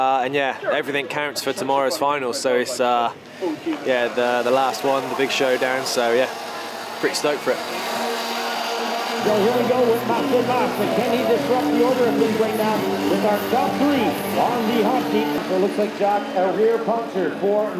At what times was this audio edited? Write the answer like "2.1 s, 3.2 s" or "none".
none